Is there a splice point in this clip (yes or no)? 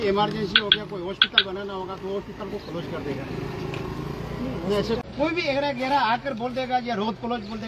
yes